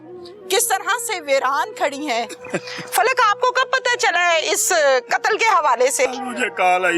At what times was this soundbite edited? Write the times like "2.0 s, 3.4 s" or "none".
2.4 s, 6.1 s

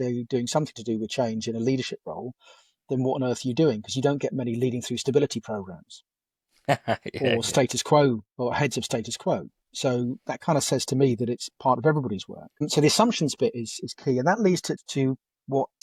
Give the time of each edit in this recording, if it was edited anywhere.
none

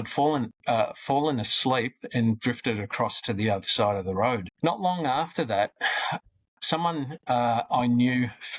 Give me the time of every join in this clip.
4.5 s

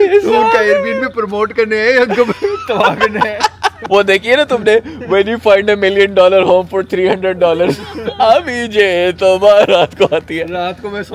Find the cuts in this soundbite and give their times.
none

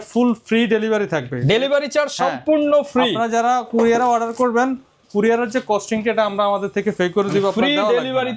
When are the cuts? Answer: none

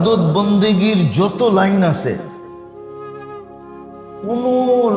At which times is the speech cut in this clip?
2.2 s, 3.5 s

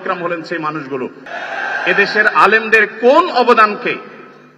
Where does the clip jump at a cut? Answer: 1.3 s

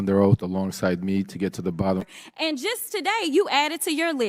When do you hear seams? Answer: 2.0 s

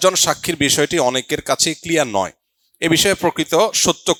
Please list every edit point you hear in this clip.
none

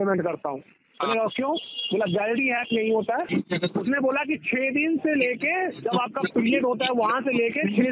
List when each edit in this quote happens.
3.3 s

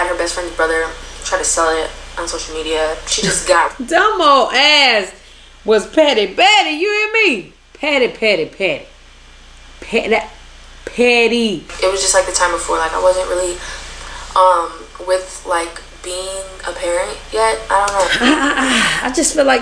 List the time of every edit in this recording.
11.7 s

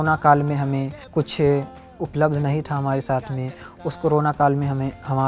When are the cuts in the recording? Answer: 1.0 s

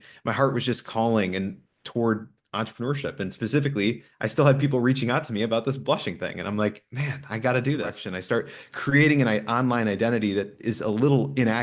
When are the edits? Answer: 8.1 s

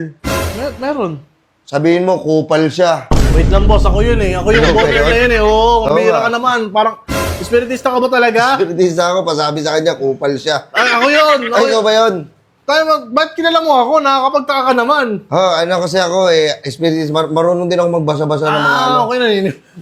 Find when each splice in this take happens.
none

